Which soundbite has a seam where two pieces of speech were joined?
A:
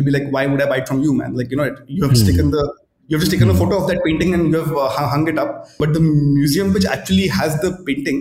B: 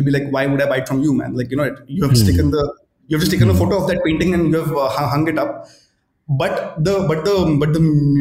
A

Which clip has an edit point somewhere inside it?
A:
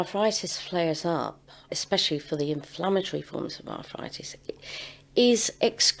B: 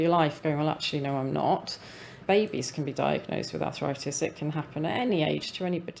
B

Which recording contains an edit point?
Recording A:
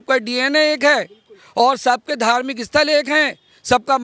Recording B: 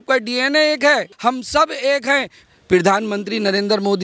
B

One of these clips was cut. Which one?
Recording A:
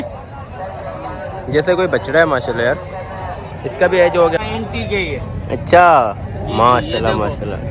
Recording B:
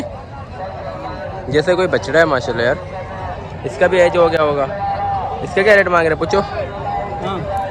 A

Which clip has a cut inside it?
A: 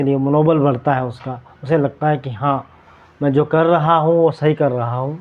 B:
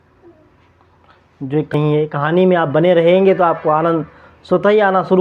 B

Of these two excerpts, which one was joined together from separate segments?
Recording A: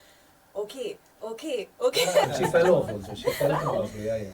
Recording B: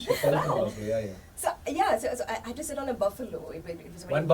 A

